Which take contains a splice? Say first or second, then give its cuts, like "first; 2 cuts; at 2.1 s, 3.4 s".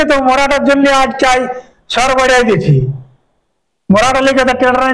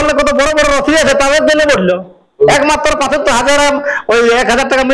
second; 1 cut; at 2.5 s